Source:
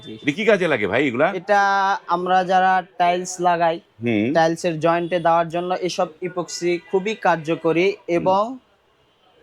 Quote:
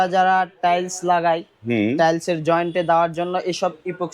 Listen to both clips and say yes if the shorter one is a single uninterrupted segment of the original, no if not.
yes